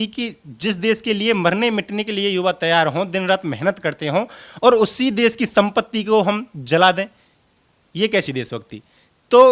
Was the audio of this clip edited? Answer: no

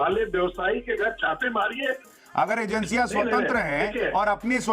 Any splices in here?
yes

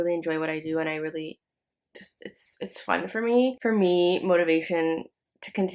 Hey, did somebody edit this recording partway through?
yes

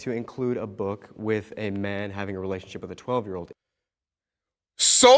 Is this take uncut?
yes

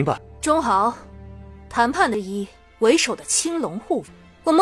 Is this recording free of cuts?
no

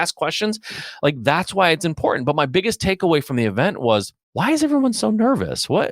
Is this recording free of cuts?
no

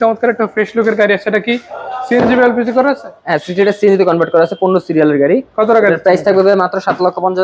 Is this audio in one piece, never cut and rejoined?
yes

